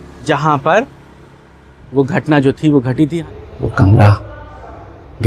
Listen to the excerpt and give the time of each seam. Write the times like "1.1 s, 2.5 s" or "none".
3.1 s

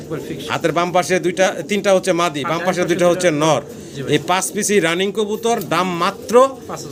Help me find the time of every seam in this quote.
none

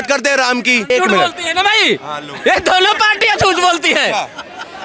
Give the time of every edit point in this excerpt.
0.9 s

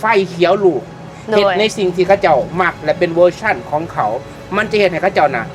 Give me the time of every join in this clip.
none

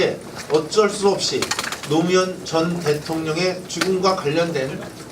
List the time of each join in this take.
1.3 s

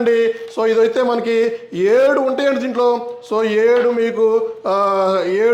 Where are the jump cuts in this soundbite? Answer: none

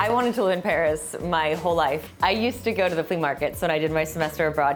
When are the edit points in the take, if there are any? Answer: none

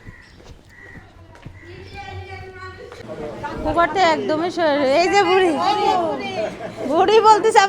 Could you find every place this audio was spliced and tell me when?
3.1 s

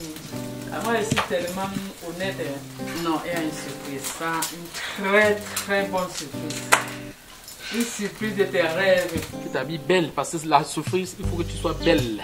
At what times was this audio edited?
2.7 s, 9.3 s

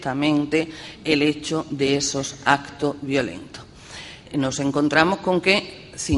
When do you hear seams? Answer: none

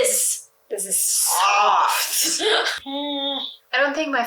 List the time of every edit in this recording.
2.7 s

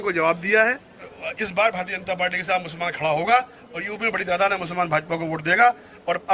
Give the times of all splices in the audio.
1.1 s

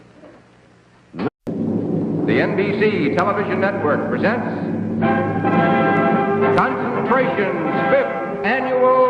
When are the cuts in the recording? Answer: none

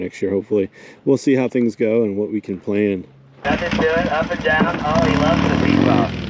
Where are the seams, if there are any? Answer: 3.4 s

